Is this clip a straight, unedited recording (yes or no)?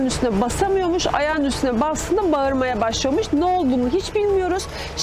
yes